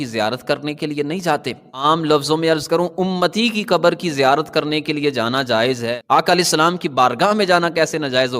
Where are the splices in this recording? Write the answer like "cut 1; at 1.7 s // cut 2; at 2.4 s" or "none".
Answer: cut 1; at 1.8 s